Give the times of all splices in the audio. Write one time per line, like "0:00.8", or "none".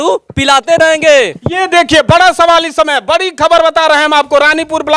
0:01.4